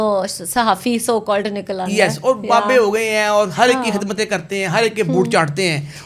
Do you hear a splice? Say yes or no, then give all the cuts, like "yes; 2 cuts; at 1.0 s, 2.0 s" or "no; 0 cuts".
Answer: no; 0 cuts